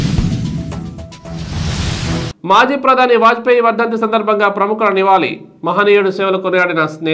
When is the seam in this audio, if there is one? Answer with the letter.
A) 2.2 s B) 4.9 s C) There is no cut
A